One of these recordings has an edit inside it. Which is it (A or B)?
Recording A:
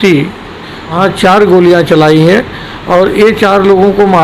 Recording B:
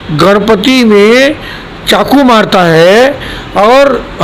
A